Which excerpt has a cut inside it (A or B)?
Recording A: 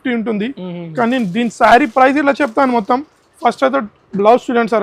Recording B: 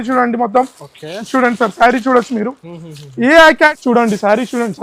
B